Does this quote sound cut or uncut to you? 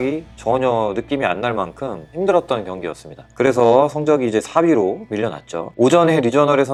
uncut